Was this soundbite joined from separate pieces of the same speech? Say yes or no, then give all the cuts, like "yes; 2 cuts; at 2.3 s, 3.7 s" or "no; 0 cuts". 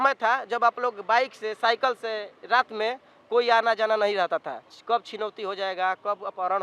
no; 0 cuts